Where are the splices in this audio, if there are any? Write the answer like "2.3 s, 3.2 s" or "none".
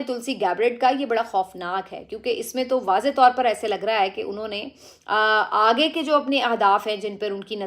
none